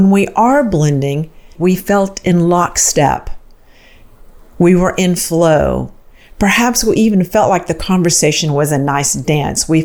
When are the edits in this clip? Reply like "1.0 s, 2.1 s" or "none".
1.5 s